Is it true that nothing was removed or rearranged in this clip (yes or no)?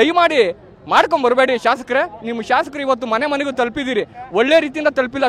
yes